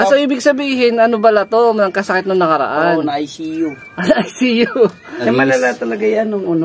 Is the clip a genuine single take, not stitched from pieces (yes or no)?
no